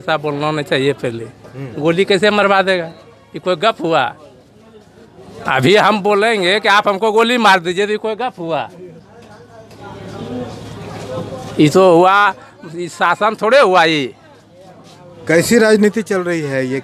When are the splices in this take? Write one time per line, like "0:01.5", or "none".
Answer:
none